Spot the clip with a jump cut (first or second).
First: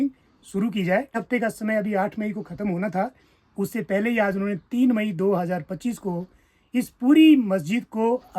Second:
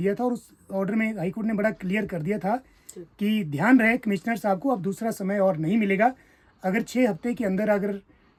first